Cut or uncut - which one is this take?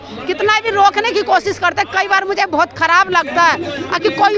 uncut